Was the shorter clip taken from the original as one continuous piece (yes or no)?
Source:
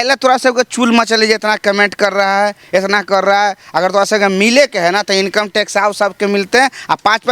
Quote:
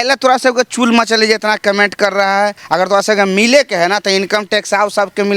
no